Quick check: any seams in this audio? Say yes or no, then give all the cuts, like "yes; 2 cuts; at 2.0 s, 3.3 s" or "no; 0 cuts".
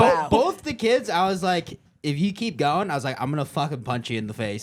no; 0 cuts